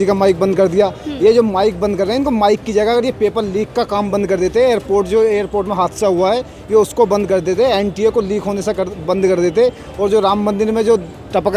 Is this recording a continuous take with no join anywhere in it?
yes; 0 cuts

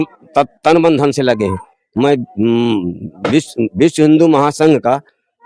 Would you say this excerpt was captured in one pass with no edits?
yes; 0 cuts

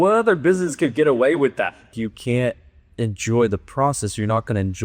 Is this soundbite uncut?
no; 1 cut; at 1.9 s

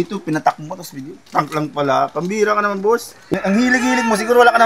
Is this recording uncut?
no; 1 cut; at 3.3 s

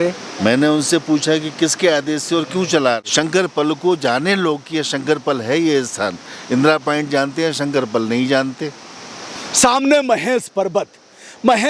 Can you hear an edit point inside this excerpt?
yes; 1 cut; at 3.0 s

